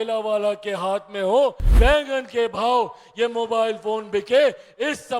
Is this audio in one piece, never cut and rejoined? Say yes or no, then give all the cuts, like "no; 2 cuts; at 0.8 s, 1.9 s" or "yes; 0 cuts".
no; 1 cut; at 1.6 s